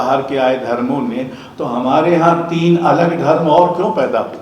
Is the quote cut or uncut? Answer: uncut